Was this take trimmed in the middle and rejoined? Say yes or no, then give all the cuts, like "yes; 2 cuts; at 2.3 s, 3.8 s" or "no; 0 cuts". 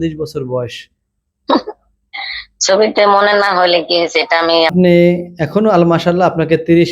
yes; 1 cut; at 4.7 s